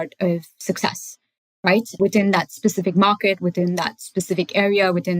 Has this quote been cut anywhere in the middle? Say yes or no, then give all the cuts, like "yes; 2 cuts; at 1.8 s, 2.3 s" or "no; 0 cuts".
yes; 1 cut; at 2.0 s